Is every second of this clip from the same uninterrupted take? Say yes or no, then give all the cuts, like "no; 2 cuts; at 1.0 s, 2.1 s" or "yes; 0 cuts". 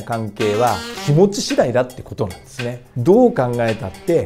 no; 2 cuts; at 0.9 s, 2.9 s